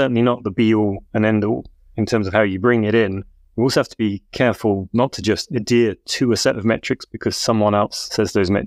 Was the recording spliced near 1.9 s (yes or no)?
yes